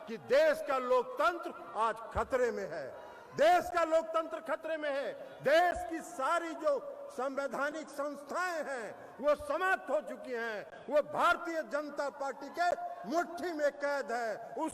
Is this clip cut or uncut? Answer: uncut